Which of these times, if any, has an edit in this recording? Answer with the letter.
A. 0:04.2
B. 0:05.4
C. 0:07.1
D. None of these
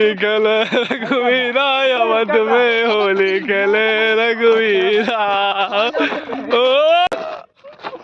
C